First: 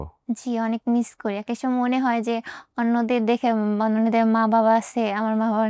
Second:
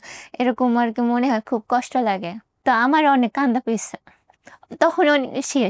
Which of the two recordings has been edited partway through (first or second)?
second